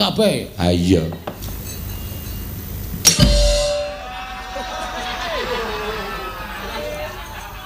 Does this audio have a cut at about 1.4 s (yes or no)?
yes